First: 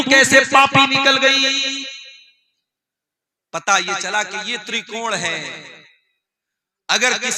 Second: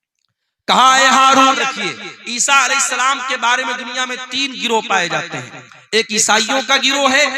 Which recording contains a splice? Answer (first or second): second